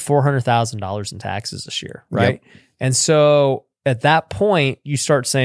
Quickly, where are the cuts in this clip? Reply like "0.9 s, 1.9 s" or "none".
none

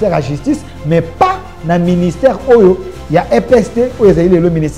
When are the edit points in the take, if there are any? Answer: none

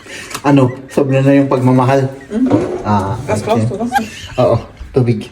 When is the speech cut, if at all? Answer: 3.2 s

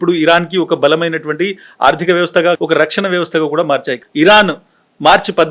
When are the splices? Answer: 2.6 s, 4.0 s

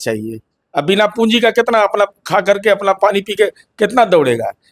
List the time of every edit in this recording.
none

